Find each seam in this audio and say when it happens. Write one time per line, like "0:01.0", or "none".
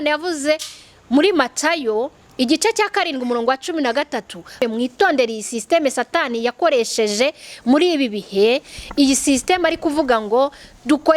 0:04.6